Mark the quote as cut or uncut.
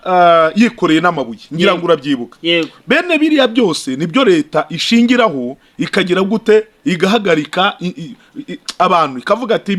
uncut